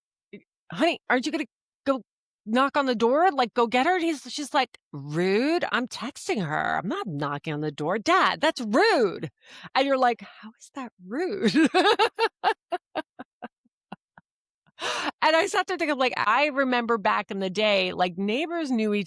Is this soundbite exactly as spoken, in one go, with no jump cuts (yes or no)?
no